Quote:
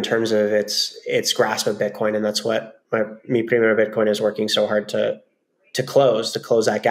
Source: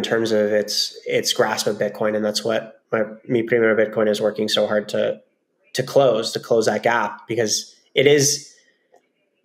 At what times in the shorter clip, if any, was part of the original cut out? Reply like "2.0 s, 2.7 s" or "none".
none